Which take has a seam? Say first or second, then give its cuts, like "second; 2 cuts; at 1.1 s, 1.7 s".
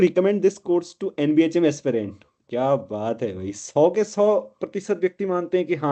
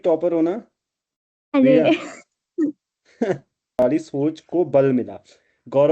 second; 1 cut; at 3.8 s